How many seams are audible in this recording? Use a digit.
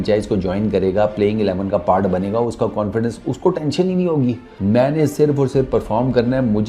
1